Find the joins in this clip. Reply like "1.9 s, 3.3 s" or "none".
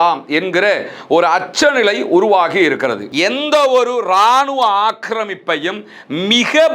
3.1 s